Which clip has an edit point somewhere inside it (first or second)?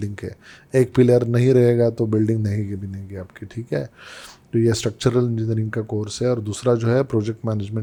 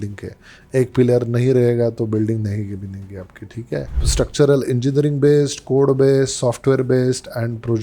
second